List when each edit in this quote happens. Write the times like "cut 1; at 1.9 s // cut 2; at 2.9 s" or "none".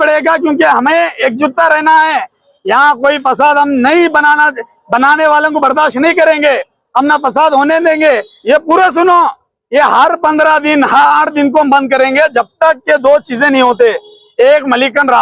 cut 1; at 8.3 s

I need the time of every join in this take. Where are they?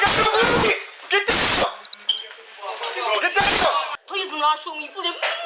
cut 1; at 3.9 s

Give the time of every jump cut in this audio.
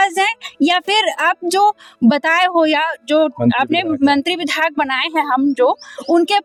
none

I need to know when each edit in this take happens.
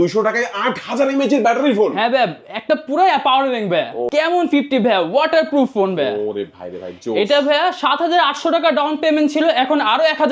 cut 1; at 4.1 s

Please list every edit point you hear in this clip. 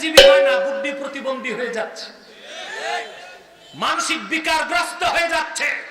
cut 1; at 1.0 s

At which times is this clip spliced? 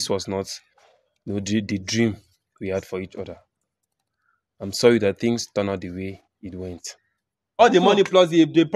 cut 1; at 7.5 s

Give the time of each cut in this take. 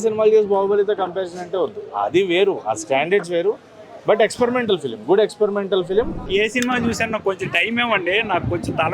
cut 1; at 6.2 s

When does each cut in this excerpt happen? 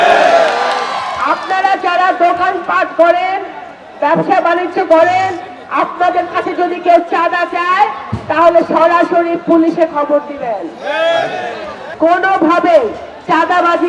cut 1; at 11.8 s

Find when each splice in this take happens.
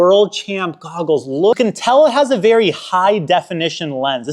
cut 1; at 1.6 s

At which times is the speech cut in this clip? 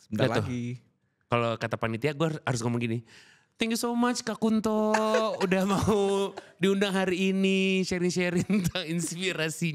none

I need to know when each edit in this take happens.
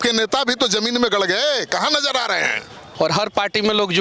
cut 1; at 2.8 s

